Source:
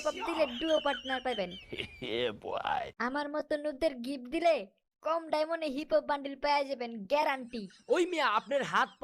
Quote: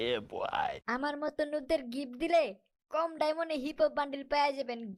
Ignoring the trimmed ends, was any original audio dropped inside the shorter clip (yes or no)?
no